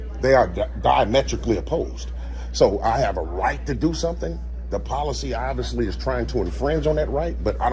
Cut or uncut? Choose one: uncut